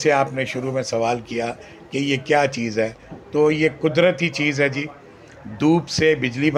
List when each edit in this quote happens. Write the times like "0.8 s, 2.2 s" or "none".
none